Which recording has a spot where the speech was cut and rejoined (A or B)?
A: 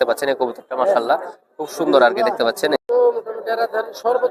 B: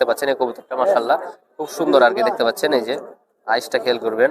A